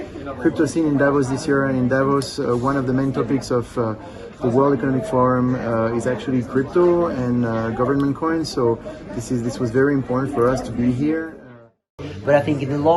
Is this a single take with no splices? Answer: no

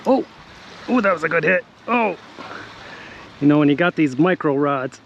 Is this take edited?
no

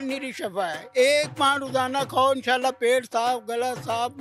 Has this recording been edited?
no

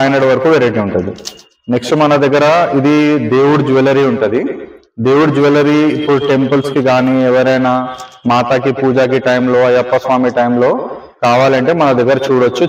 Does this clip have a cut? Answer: no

